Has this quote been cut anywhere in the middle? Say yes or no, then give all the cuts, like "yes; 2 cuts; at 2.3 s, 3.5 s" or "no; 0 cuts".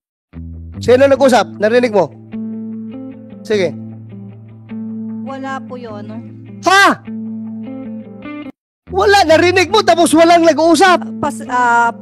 yes; 3 cuts; at 0.9 s, 4.0 s, 5.4 s